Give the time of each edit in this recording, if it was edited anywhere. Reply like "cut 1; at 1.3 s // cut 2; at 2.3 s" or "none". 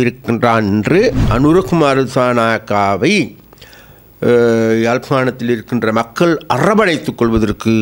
cut 1; at 1.2 s